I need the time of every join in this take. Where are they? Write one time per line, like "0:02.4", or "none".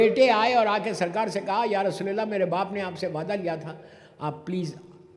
none